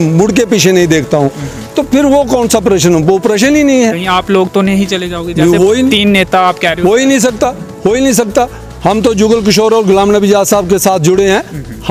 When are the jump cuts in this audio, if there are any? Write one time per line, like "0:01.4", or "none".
none